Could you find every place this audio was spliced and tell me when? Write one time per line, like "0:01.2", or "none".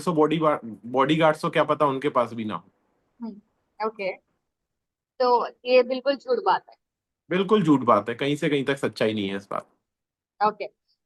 none

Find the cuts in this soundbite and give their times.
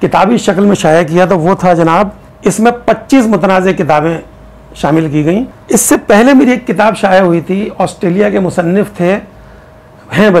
0:02.2
0:05.5

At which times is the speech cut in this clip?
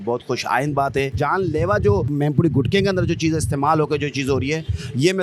0:01.1
0:02.1

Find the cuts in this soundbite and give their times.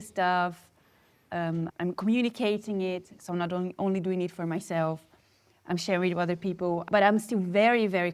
0:06.9

